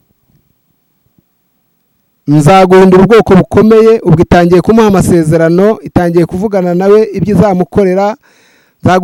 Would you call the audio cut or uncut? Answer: uncut